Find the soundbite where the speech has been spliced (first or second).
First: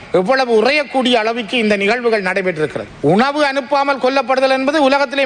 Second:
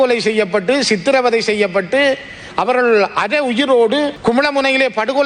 first